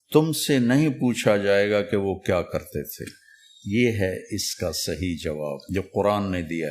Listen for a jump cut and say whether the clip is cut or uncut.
cut